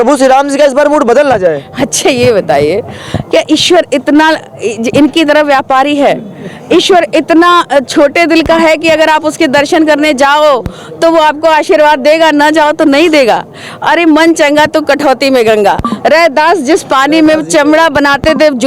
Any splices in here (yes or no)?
no